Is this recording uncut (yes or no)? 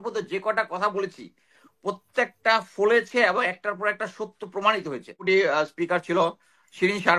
no